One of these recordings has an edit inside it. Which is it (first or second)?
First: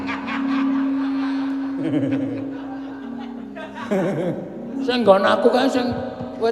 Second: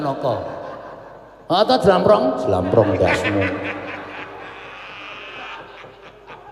first